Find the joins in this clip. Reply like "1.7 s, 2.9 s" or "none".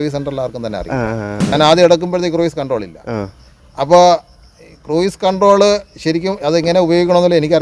1.5 s